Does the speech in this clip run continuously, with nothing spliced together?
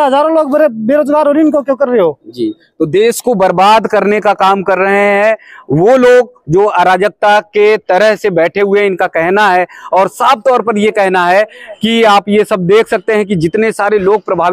yes; 0 cuts

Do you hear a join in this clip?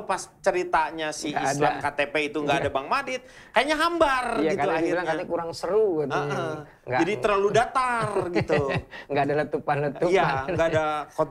no; 0 cuts

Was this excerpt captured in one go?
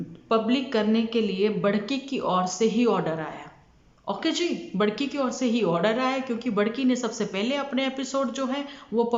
yes; 0 cuts

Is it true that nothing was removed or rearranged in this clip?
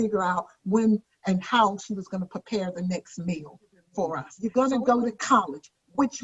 no; 1 cut; at 4.3 s

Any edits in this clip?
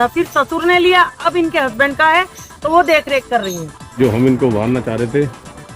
yes; 1 cut; at 3.9 s

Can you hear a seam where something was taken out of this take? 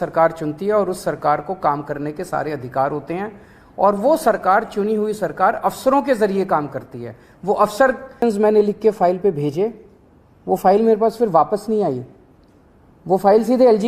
yes; 1 cut; at 8.1 s

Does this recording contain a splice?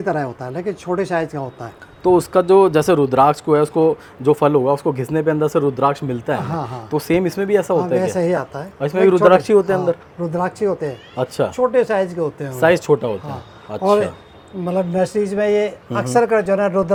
no; 0 cuts

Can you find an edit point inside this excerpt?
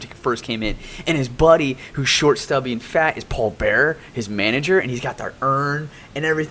yes; 1 cut; at 2.1 s

